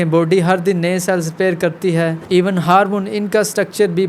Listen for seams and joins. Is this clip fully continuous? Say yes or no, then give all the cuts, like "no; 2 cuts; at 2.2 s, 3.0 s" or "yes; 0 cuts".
no; 1 cut; at 2.2 s